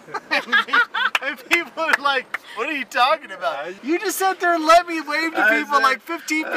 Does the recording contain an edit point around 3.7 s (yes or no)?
yes